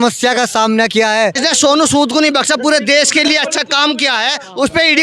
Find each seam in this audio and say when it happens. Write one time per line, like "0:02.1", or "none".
0:01.4